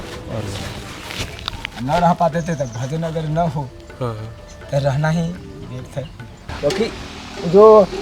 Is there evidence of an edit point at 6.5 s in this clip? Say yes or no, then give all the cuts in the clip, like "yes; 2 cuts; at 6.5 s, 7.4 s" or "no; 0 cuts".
yes; 1 cut; at 6.5 s